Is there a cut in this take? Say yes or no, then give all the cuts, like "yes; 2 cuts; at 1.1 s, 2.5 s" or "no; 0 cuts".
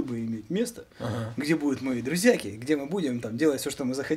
no; 0 cuts